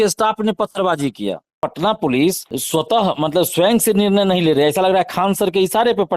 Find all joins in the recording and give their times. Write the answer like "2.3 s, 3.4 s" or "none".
1.6 s, 2.5 s